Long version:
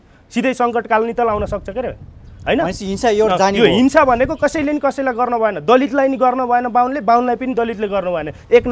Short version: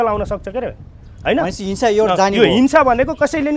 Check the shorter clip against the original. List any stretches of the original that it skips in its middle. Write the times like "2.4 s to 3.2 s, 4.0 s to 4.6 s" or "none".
none

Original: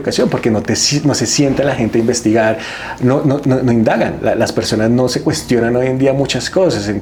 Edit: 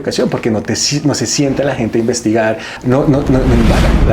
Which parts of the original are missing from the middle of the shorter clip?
2.7 s to 2.9 s

